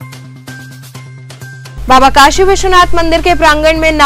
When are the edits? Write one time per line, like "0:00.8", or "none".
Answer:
0:01.7

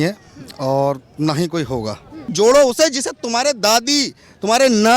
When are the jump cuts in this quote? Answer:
0:02.3

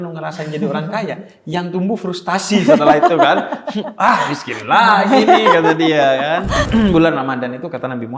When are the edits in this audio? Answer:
0:06.7

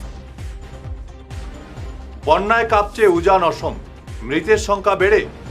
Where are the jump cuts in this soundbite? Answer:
0:00.9

